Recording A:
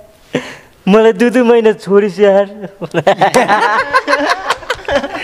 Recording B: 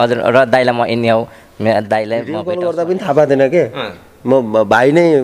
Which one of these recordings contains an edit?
B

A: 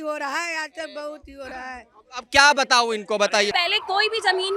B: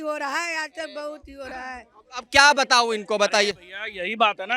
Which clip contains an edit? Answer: A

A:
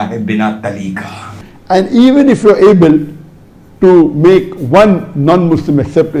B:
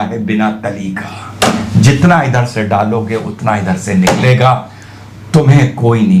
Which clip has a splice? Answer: A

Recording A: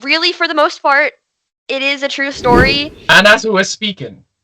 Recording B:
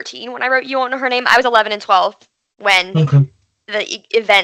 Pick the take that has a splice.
A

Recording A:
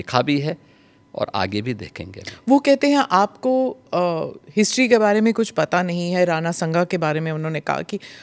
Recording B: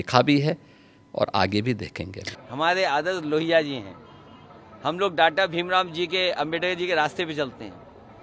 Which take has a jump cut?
B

